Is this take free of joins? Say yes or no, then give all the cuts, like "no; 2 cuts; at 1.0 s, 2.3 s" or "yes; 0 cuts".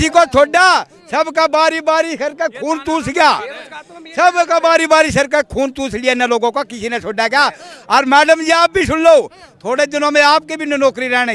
yes; 0 cuts